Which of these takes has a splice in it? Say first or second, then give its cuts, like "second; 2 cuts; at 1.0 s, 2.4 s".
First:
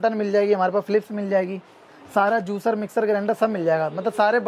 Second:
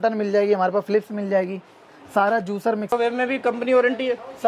second; 1 cut; at 2.9 s